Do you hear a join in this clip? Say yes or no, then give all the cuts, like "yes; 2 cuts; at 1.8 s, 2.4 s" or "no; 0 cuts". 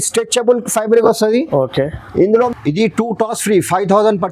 yes; 1 cut; at 2.3 s